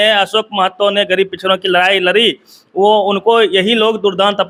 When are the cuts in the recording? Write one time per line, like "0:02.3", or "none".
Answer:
none

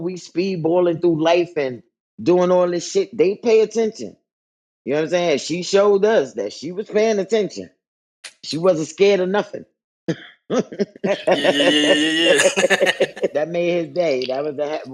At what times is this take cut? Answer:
0:11.0
0:13.3

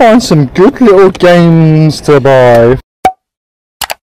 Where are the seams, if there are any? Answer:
0:02.8

